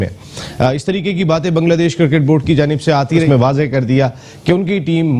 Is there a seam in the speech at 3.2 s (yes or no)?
yes